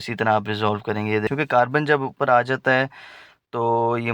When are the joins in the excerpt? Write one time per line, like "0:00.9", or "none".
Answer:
0:01.3